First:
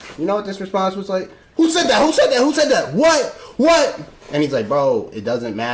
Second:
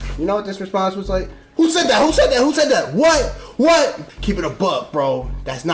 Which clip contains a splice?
second; 1 cut; at 4.1 s

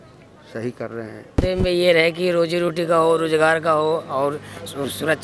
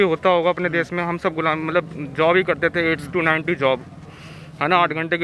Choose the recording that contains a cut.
first; 1 cut; at 1.3 s

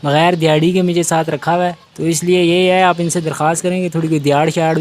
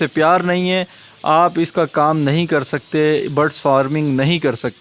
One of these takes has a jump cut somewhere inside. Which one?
first; 1 cut; at 1.8 s

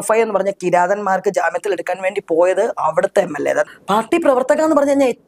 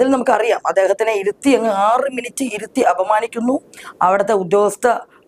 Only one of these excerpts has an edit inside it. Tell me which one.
first; 1 cut; at 3.7 s

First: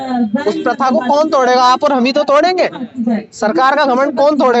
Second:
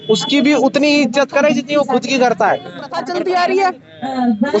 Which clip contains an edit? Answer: second; 1 cut; at 3.0 s

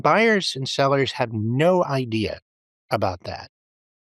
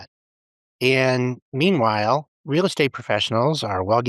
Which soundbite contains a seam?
second; 1 cut; at 2.4 s

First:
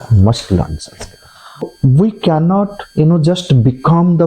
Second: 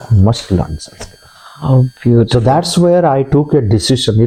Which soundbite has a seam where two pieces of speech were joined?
first; 1 cut; at 1.6 s

